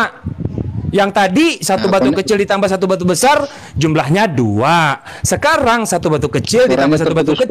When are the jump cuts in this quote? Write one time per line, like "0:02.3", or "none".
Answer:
none